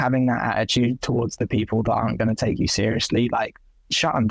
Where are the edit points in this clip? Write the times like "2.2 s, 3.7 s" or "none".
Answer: none